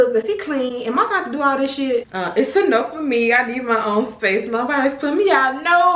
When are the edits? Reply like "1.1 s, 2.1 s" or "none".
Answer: 2.1 s